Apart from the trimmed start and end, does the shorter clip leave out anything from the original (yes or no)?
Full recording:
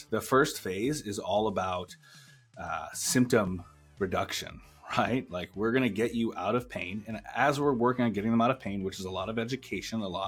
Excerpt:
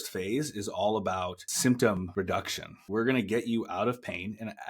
yes